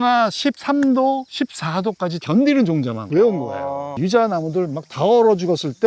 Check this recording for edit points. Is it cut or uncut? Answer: cut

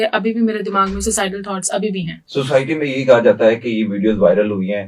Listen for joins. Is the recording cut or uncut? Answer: cut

